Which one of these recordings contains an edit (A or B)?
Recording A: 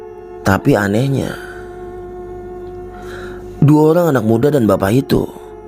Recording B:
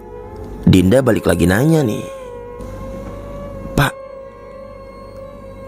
A